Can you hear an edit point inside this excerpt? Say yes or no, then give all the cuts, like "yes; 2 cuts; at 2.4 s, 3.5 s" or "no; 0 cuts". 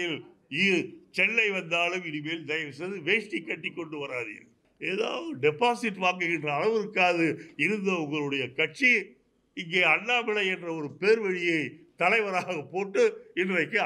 yes; 1 cut; at 4.6 s